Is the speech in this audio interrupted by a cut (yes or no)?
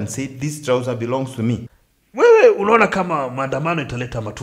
yes